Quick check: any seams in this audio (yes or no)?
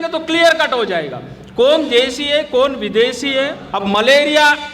yes